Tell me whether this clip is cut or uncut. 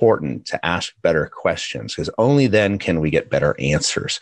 uncut